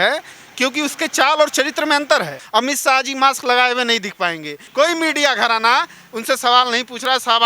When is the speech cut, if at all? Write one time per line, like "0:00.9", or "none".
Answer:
0:02.4
0:04.6